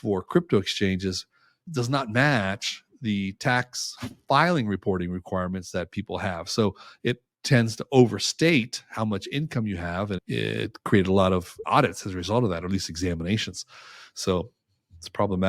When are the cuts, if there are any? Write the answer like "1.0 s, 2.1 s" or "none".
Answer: none